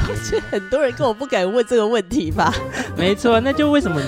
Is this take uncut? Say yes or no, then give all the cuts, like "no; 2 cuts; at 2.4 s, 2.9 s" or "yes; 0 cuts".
no; 1 cut; at 2.7 s